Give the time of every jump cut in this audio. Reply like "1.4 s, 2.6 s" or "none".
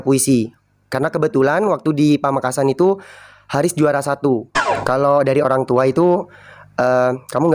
4.7 s